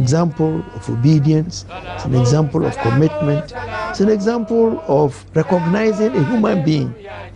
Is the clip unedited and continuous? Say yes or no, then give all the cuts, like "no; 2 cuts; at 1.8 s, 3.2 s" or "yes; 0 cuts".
yes; 0 cuts